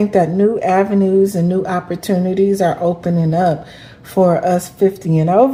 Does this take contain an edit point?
no; 0 cuts

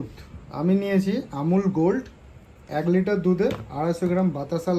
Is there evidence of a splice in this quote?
yes; 1 cut; at 2.5 s

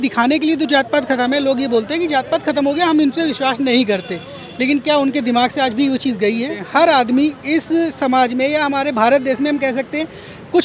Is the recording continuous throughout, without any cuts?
no; 1 cut; at 6.6 s

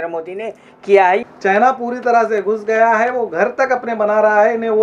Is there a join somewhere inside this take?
yes; 1 cut; at 1.2 s

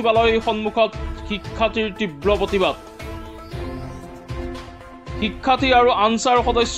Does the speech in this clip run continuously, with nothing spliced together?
yes; 0 cuts

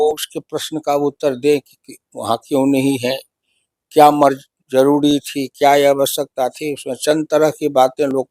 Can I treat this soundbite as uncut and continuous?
yes; 0 cuts

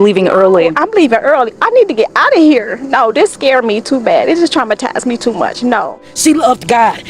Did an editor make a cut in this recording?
yes; 1 cut; at 5.9 s

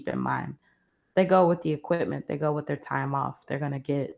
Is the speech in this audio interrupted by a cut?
no; 0 cuts

